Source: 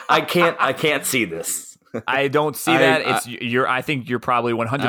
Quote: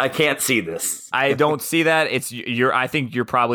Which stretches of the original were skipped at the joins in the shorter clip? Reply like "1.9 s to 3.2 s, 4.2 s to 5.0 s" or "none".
1.6 s to 1.9 s

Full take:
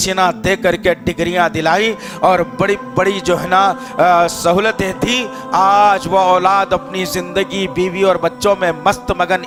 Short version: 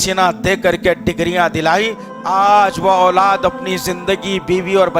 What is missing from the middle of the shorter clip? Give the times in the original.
2.0 s to 5.3 s

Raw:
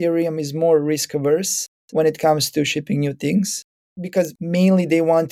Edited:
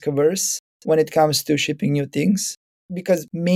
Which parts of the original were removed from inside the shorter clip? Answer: none

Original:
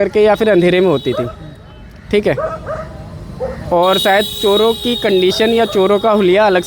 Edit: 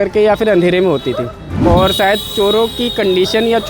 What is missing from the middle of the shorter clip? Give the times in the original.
1.4 s to 3.5 s

